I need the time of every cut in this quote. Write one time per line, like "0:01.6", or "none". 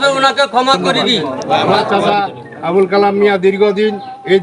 0:02.0